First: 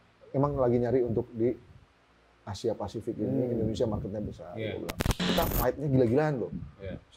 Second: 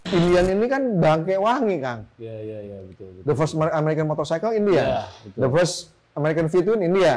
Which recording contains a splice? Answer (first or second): first